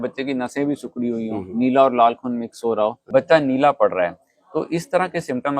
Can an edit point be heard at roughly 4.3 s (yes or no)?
no